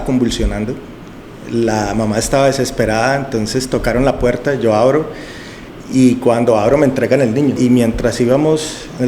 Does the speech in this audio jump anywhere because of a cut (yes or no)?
yes